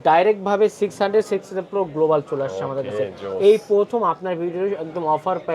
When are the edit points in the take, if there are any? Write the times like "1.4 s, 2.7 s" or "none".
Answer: none